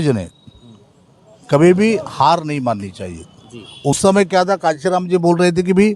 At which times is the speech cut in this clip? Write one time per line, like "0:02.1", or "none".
0:04.0